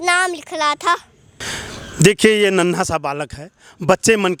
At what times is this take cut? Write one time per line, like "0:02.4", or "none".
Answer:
none